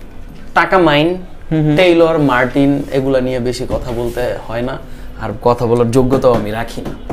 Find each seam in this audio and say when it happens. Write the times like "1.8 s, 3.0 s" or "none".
none